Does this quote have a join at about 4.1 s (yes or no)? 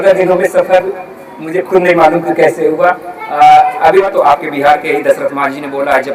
yes